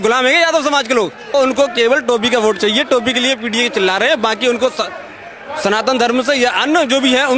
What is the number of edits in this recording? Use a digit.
1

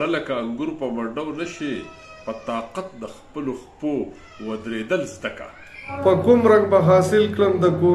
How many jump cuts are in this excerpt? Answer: 1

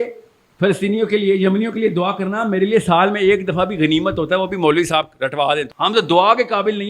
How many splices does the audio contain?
1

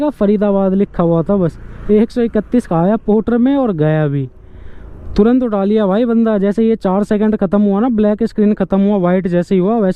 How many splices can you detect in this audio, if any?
0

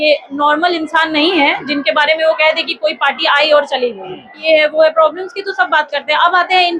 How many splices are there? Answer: 1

